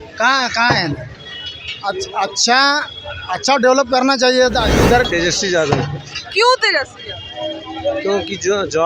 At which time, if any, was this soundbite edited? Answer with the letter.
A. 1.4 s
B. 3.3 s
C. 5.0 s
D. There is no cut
C